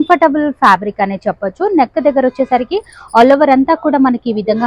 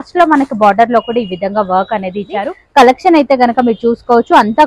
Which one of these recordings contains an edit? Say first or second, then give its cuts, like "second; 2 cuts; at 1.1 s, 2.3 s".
second; 1 cut; at 2.6 s